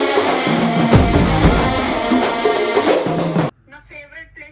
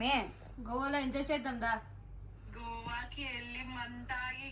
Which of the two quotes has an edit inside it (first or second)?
first